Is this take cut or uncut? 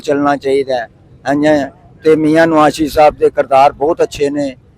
uncut